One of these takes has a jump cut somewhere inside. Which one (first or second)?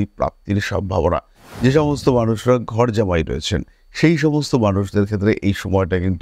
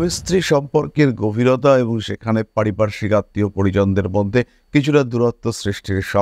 first